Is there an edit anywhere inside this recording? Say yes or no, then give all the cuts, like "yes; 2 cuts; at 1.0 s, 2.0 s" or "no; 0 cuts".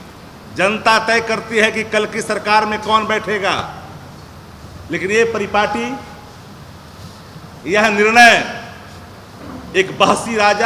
no; 0 cuts